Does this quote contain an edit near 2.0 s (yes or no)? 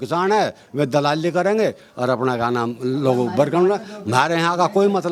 no